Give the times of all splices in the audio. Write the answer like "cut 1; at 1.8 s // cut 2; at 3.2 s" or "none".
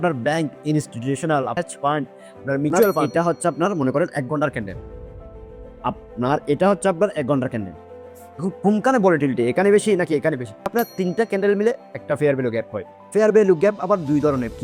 cut 1; at 1.5 s // cut 2; at 3.1 s // cut 3; at 10.7 s